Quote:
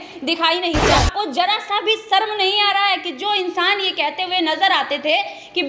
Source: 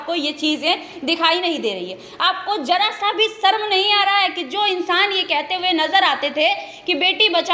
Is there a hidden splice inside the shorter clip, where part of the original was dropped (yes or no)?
yes